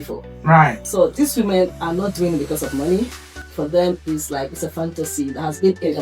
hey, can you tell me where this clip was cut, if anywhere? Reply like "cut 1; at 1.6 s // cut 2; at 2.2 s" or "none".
cut 1; at 0.8 s // cut 2; at 3.5 s